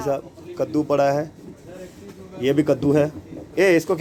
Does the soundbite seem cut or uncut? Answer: uncut